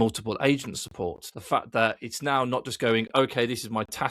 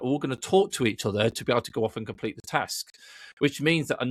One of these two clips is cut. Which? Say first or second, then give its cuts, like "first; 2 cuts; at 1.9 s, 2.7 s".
first; 1 cut; at 1.3 s